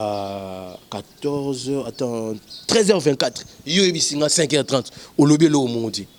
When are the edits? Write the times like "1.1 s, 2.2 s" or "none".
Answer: none